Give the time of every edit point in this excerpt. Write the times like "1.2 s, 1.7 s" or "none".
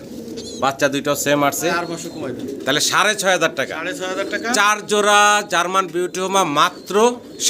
1.8 s